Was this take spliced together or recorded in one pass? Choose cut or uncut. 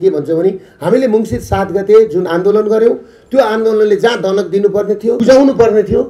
cut